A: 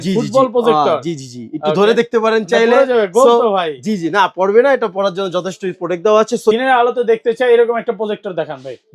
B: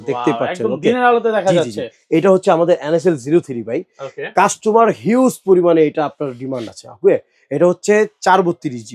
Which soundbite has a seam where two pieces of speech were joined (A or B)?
A